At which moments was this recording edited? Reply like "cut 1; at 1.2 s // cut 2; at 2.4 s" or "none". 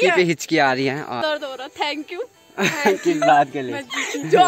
cut 1; at 1.2 s